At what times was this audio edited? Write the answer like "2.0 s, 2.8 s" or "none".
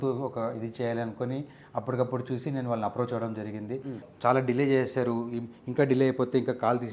4.0 s